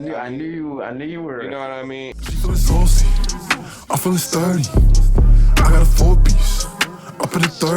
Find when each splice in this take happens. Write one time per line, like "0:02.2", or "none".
0:02.2